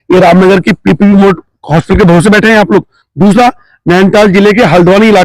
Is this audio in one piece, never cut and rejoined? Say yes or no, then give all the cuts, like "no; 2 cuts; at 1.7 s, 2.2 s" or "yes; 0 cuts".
yes; 0 cuts